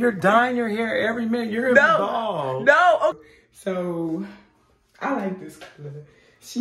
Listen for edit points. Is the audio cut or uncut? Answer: cut